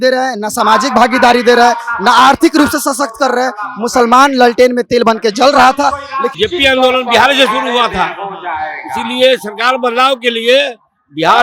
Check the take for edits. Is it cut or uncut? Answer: cut